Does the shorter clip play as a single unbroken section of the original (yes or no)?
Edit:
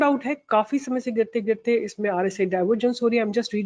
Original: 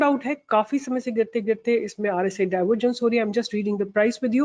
yes